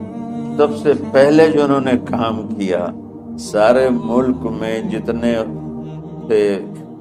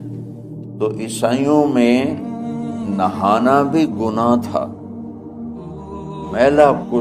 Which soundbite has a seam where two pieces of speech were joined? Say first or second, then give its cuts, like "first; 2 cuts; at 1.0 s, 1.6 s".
second; 2 cuts; at 4.7 s, 6.3 s